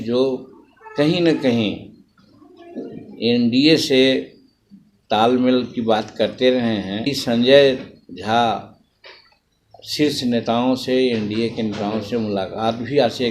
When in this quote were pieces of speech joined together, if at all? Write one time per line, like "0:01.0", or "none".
0:07.1